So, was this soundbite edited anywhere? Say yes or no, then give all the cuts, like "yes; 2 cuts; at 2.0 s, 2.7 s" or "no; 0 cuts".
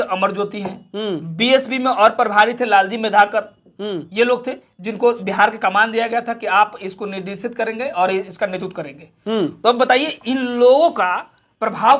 no; 0 cuts